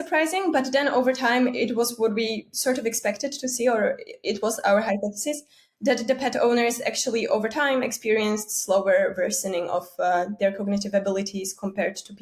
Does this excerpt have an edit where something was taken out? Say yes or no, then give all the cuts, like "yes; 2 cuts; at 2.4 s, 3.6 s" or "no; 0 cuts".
no; 0 cuts